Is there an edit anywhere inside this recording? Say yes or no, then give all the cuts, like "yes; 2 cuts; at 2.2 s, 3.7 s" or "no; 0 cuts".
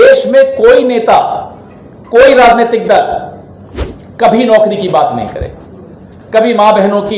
no; 0 cuts